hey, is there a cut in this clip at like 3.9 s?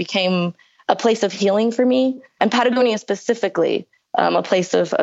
yes; 2 cuts; at 2.3 s, 3.9 s

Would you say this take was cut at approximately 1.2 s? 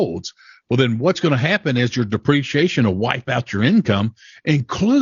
yes; 1 cut; at 1.2 s

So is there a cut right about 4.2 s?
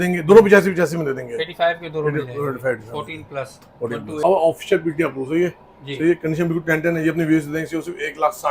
yes; 1 cut; at 4.2 s

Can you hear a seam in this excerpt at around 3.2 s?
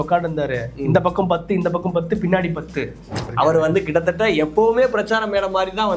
yes; 1 cut; at 3.2 s

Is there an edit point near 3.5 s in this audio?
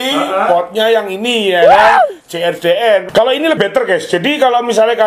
yes; 1 cut; at 3.5 s

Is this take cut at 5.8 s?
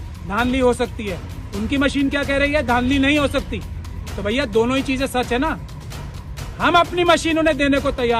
no; 0 cuts

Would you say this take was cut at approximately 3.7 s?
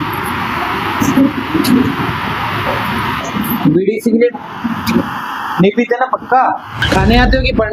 no; 1 cut; at 6.8 s

